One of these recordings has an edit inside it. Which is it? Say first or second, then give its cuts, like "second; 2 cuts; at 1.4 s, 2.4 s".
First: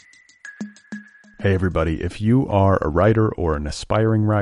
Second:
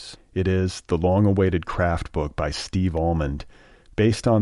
first; 1 cut; at 0.9 s